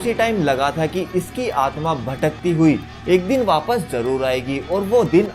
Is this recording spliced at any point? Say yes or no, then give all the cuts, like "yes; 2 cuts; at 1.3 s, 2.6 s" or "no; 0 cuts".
no; 0 cuts